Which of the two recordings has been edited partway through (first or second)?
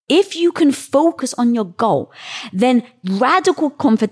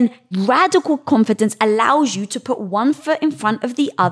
first